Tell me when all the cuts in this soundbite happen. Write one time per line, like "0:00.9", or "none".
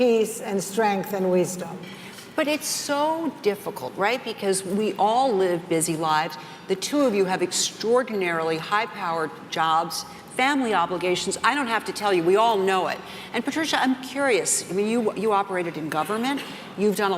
0:08.5